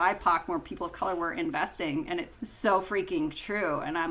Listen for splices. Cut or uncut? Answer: uncut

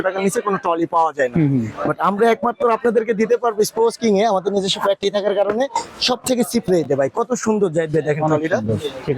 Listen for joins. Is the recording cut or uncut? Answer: uncut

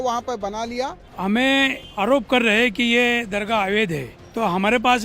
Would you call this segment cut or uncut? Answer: cut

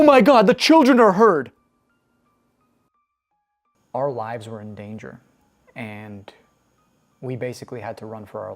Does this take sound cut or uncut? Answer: cut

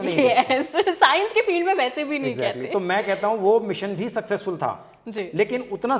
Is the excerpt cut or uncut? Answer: uncut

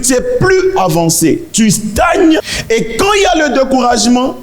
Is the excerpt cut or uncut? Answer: cut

